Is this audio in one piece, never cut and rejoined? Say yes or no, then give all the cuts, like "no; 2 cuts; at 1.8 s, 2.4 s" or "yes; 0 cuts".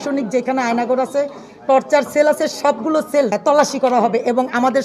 no; 1 cut; at 3.4 s